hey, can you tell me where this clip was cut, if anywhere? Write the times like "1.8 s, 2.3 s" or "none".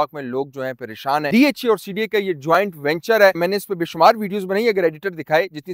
1.3 s